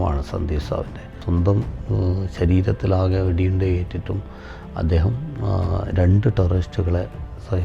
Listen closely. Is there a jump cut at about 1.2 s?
yes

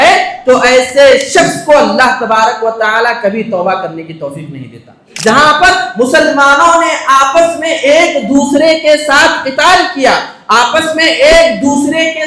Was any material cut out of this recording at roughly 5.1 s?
yes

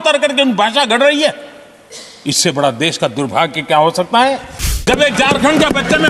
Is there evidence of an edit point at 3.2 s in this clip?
no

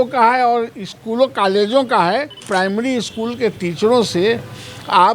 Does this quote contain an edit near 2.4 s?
yes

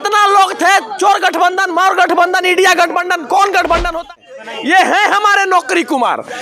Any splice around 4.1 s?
yes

